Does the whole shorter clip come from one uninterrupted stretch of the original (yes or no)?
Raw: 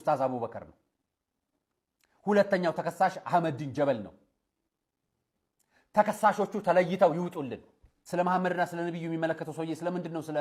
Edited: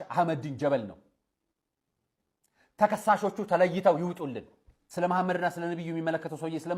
yes